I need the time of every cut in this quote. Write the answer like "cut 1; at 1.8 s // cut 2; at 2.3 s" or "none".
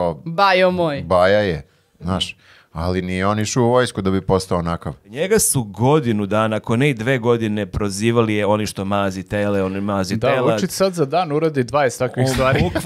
cut 1; at 5.1 s

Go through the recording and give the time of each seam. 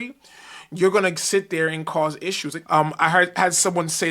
cut 1; at 2.5 s

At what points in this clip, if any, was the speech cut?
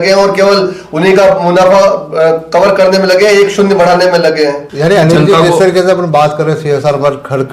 cut 1; at 4.7 s

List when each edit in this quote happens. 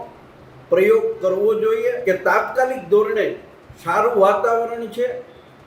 cut 1; at 2.0 s

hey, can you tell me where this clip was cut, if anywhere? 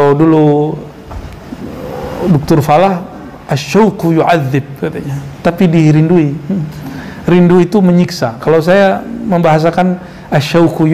none

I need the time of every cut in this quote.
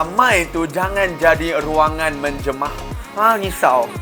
none

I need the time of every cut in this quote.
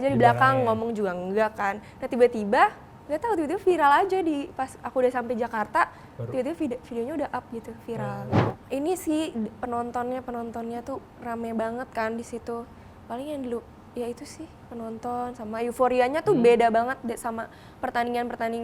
cut 1; at 8.5 s

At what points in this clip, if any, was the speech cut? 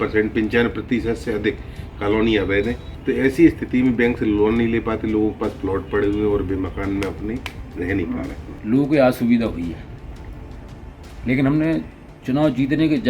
cut 1; at 2.9 s // cut 2; at 8.5 s

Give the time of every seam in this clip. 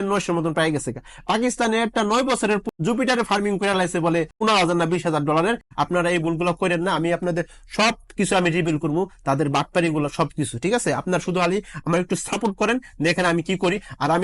cut 1; at 2.6 s // cut 2; at 4.3 s // cut 3; at 5.7 s

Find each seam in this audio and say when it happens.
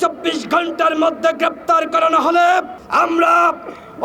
cut 1; at 2.8 s

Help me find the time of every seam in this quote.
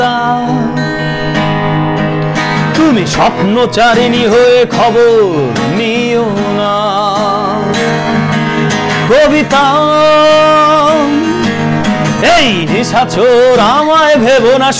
none

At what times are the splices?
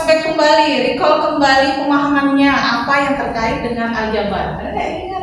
none

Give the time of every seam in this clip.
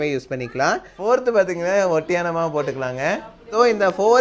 cut 1; at 0.9 s

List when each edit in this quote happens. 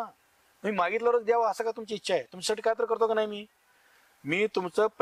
none

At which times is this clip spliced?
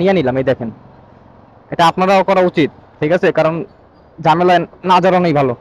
none

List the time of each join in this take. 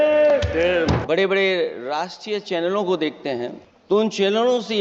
cut 1; at 1.0 s // cut 2; at 3.7 s

